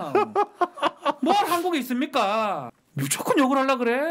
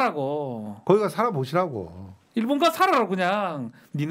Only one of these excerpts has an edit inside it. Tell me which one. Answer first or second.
first